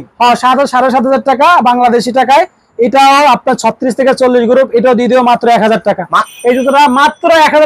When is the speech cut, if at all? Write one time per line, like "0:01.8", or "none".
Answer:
0:06.3